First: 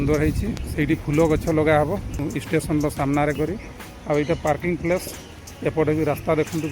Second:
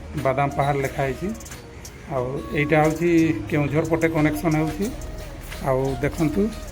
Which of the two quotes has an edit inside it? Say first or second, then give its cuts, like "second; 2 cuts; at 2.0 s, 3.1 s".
first; 1 cut; at 2.2 s